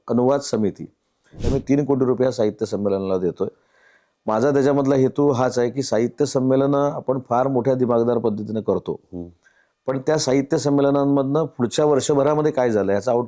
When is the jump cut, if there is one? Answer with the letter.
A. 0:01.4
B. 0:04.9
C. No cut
A